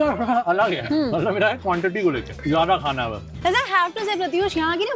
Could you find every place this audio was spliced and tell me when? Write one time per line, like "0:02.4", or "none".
0:00.8
0:02.3
0:03.4